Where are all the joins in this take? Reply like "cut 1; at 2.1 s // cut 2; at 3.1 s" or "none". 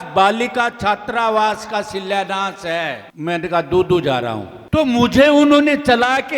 cut 1; at 3.1 s // cut 2; at 4.5 s